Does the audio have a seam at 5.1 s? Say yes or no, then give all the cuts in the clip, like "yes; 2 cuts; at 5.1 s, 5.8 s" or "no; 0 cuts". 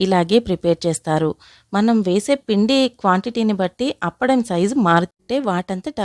yes; 1 cut; at 5.1 s